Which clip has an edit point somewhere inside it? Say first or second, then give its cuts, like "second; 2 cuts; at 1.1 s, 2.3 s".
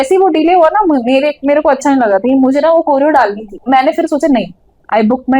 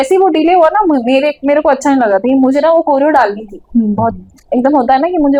first; 1 cut; at 3.5 s